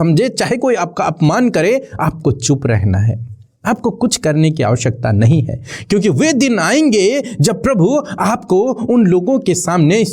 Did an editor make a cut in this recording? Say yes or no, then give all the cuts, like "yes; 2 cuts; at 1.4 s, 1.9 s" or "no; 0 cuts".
no; 0 cuts